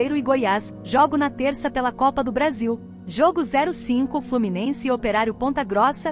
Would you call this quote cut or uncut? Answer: cut